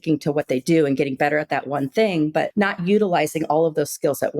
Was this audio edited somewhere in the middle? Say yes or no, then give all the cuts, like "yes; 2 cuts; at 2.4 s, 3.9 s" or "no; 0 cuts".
yes; 1 cut; at 2.5 s